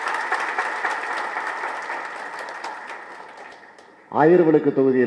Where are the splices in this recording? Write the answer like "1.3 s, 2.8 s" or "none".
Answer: 3.6 s